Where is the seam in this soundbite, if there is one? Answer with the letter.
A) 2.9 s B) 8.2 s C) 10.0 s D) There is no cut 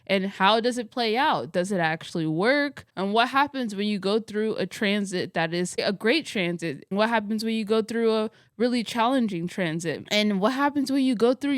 C